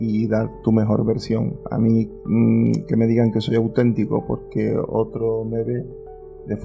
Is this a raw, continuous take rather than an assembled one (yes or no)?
yes